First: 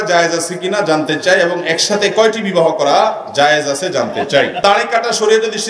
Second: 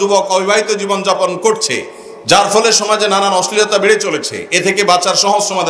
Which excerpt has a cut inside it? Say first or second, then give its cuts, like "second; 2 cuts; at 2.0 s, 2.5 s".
first; 1 cut; at 4.6 s